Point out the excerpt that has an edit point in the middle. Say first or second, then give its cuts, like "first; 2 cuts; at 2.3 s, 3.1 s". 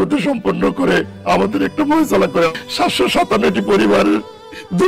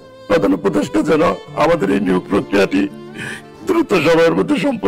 first; 1 cut; at 2.5 s